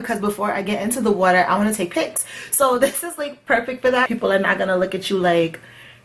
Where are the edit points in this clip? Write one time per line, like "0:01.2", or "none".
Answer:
0:04.1